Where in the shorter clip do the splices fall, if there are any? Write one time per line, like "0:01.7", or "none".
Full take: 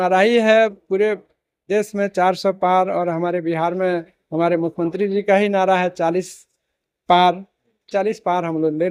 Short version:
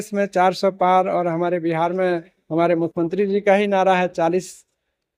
none